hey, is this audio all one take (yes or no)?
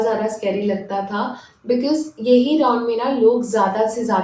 yes